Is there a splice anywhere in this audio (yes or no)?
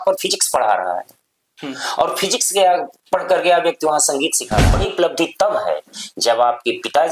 yes